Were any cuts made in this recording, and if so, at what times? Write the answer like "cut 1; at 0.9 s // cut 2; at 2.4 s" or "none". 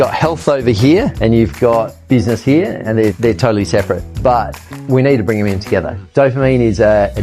cut 1; at 1.1 s // cut 2; at 3.2 s // cut 3; at 4.1 s // cut 4; at 6.0 s

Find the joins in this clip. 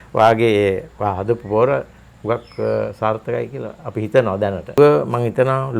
cut 1; at 4.8 s

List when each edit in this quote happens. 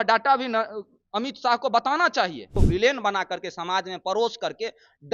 cut 1; at 2.5 s

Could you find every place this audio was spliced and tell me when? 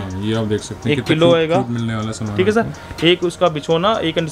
none

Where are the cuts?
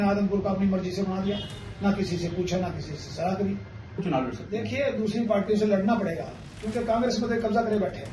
cut 1; at 4.0 s

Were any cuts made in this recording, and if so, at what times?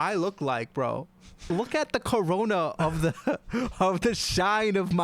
cut 1; at 1.4 s

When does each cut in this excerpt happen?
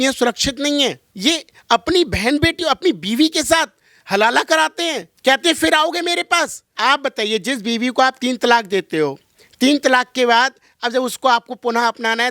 cut 1; at 1.1 s // cut 2; at 6.7 s

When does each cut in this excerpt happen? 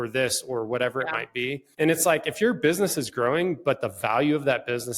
cut 1; at 1.6 s

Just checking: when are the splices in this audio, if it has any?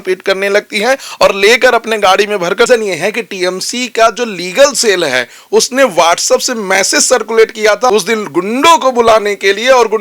cut 1; at 2.7 s // cut 2; at 7.9 s

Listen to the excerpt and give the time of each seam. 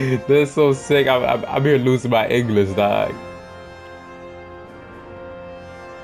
none

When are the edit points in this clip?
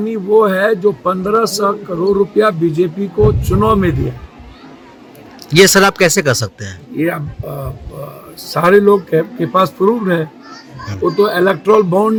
none

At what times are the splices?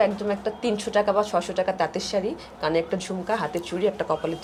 none

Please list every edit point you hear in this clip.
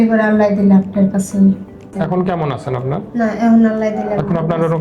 cut 1; at 1.9 s

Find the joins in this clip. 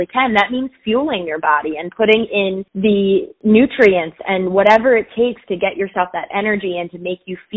cut 1; at 2.7 s // cut 2; at 3.3 s

